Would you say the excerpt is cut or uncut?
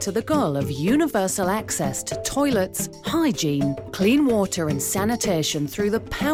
uncut